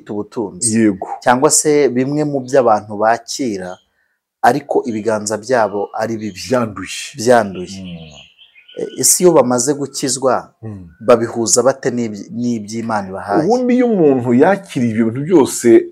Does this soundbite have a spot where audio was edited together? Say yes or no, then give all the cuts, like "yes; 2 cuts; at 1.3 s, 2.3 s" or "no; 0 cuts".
no; 0 cuts